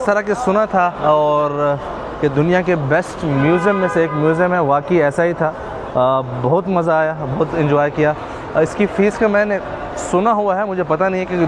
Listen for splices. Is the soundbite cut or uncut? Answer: uncut